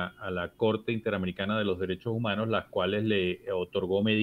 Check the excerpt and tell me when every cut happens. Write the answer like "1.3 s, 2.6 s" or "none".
none